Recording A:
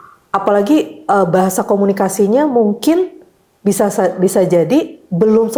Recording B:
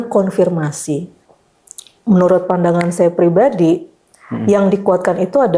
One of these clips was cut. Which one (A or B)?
B